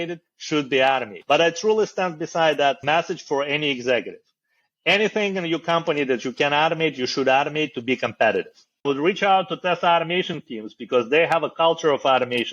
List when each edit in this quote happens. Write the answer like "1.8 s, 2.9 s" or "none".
1.1 s, 2.8 s, 8.9 s